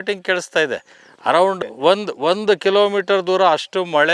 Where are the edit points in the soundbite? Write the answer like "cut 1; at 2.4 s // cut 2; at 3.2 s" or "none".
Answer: cut 1; at 1.6 s